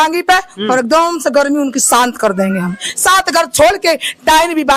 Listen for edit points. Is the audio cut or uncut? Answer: cut